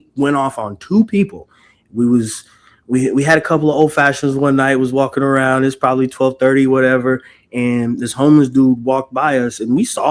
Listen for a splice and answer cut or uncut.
uncut